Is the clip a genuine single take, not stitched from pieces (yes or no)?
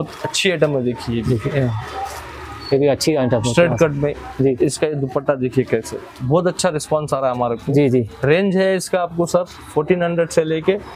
yes